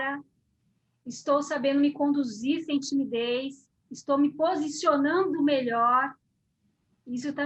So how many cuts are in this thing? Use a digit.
0